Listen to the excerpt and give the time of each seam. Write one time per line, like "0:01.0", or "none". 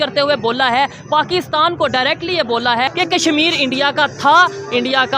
0:02.9